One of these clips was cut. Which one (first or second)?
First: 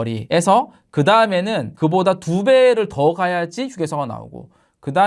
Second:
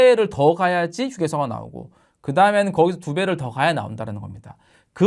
first